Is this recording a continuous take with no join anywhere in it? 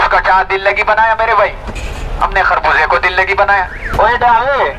no; 1 cut; at 3.8 s

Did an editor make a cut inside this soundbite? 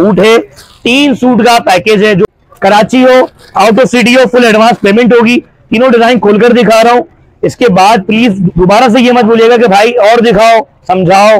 yes; 1 cut; at 2.2 s

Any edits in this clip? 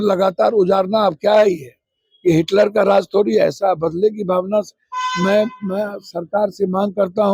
no; 0 cuts

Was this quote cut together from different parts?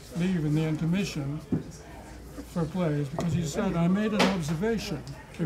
yes; 1 cut; at 3.7 s

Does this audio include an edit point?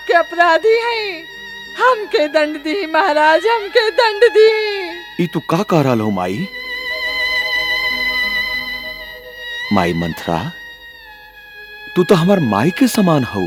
no; 0 cuts

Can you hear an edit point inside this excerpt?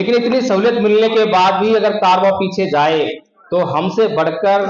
no; 0 cuts

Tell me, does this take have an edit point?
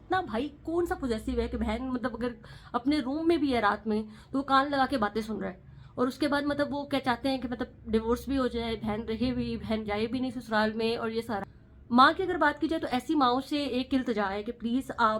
yes; 1 cut; at 11.4 s

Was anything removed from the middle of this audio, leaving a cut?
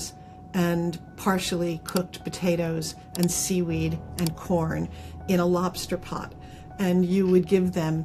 no; 0 cuts

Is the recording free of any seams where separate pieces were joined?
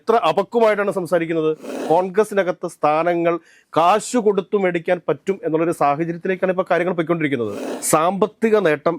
no; 2 cuts; at 1.7 s, 7.6 s

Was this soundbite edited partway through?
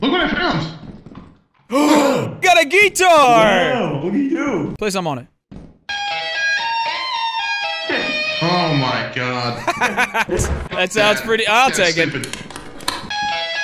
yes; 2 cuts; at 3.7 s, 4.7 s

